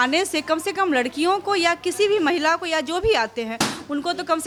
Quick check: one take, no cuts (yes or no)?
yes